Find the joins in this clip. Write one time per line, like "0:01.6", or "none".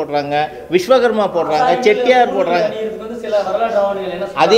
none